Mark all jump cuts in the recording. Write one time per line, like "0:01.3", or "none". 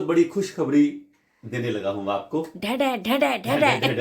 none